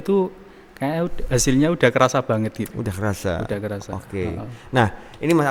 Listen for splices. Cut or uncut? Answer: uncut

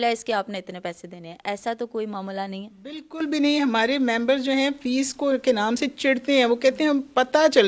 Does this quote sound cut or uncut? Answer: uncut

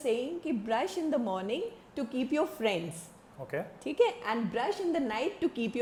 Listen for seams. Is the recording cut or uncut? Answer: uncut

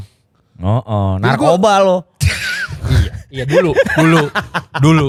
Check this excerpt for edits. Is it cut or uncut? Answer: uncut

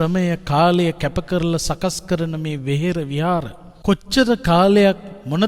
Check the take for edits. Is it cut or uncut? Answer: cut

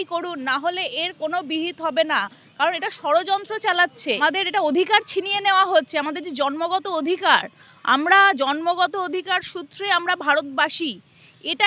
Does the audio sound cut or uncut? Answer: cut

